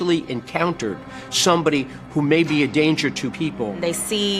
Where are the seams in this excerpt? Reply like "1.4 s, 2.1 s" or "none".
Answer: 3.4 s